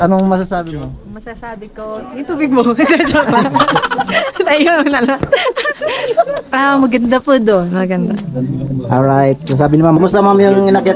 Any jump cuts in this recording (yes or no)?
yes